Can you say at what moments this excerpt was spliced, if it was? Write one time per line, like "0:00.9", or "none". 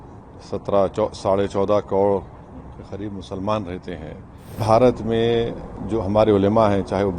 0:04.6